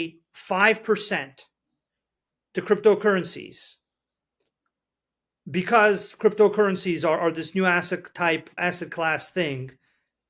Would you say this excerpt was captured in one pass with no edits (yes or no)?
yes